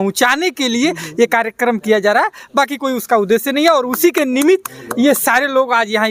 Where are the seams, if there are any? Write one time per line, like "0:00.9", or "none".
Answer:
none